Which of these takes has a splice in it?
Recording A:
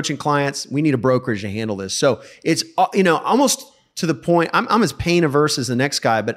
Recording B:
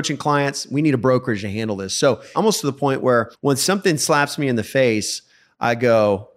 B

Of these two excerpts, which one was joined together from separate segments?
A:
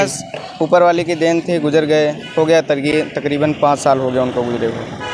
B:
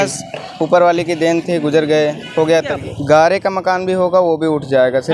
B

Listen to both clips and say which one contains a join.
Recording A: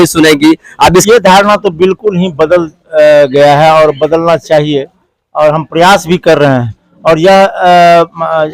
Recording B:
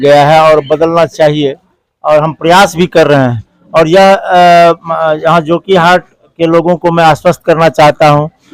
A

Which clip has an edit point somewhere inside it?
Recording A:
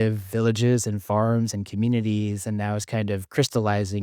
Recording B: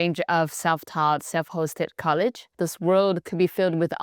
B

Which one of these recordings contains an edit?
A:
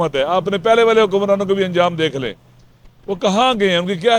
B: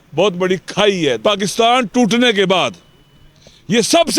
B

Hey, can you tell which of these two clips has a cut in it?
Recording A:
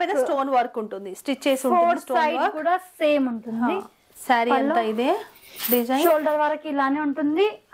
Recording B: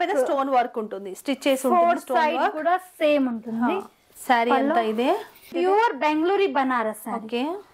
B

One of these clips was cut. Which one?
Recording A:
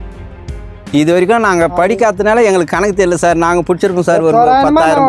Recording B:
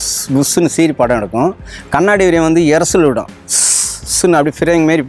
A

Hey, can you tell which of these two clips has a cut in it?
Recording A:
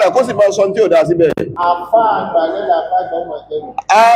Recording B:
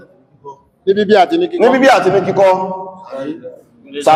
A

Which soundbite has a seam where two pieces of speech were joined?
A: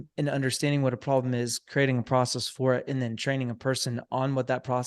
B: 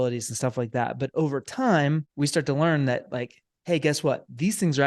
B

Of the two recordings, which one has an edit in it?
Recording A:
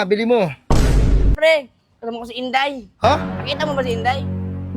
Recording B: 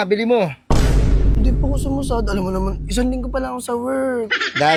A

